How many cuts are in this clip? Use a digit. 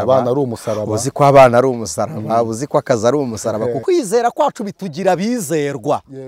1